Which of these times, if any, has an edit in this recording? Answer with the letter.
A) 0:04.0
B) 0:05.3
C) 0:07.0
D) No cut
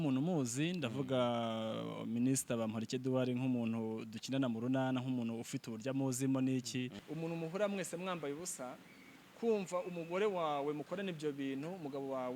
C